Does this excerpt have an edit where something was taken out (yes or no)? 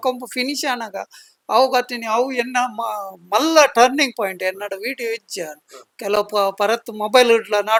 no